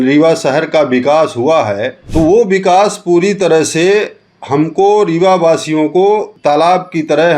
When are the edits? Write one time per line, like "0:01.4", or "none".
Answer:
0:01.9
0:06.3